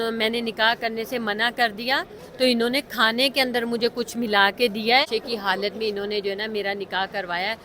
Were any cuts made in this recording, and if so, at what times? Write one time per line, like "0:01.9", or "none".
0:05.1